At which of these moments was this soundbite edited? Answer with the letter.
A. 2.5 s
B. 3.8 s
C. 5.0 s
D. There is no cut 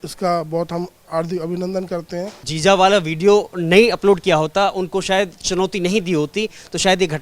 A